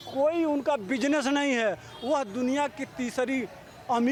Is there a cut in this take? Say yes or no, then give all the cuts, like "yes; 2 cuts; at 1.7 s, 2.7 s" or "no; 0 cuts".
no; 0 cuts